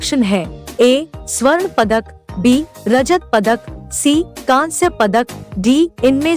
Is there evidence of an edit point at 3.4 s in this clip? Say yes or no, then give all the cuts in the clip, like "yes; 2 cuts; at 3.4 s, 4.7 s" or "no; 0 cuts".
no; 0 cuts